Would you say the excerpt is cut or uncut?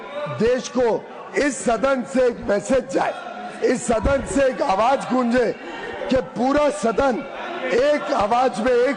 uncut